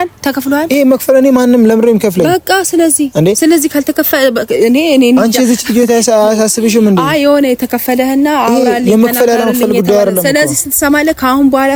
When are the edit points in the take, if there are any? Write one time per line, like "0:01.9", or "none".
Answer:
none